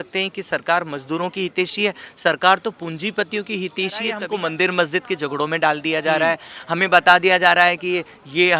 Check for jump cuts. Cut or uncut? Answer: cut